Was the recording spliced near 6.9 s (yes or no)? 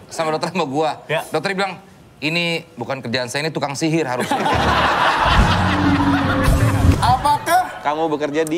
yes